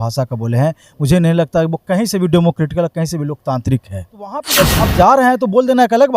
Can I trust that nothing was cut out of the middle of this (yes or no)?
no